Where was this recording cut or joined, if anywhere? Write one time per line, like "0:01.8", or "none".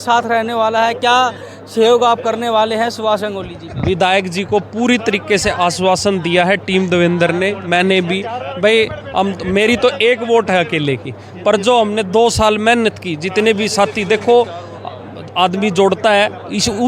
none